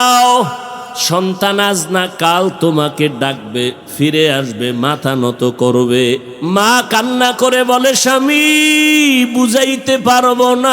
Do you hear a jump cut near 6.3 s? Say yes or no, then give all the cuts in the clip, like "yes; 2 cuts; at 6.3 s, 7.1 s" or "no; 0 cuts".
yes; 1 cut; at 6.3 s